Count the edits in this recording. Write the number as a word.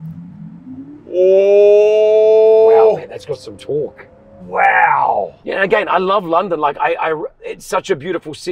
one